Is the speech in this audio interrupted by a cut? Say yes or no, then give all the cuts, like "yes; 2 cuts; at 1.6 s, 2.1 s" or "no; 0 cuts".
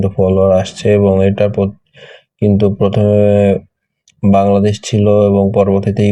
no; 0 cuts